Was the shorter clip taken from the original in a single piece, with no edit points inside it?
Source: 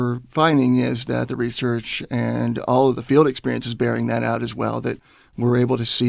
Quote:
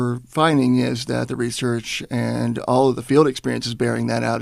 yes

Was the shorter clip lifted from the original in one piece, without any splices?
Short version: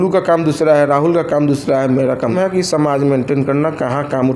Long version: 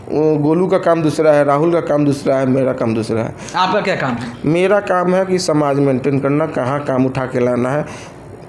no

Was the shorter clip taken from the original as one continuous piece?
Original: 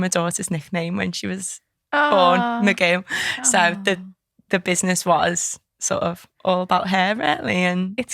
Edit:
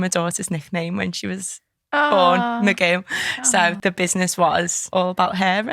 no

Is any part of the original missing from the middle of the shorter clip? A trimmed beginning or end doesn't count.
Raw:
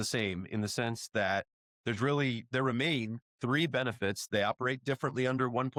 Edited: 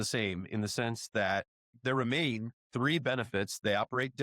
yes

